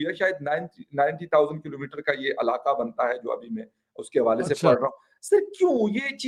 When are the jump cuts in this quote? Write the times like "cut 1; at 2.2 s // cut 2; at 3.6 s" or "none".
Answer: none